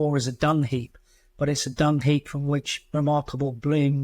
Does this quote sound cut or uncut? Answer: uncut